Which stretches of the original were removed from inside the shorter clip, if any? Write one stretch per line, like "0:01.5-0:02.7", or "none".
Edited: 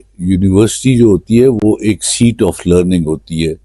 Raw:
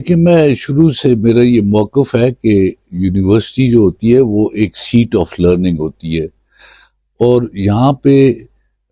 none